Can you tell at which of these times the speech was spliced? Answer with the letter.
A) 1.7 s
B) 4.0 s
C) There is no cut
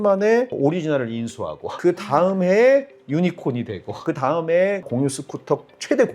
A